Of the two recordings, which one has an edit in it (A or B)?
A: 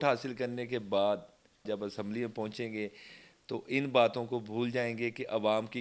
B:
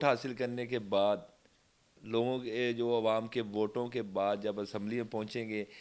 A